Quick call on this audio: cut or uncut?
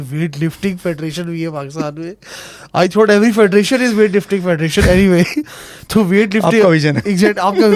uncut